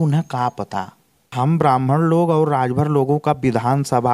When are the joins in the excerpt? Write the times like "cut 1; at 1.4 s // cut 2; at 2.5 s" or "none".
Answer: cut 1; at 1.3 s